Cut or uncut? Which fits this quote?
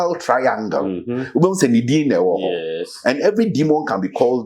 uncut